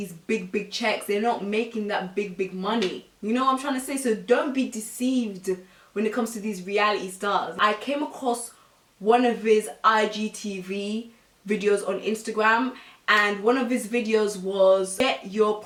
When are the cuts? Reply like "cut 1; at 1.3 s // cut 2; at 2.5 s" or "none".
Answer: none